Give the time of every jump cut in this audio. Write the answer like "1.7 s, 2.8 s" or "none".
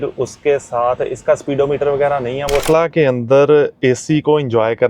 2.6 s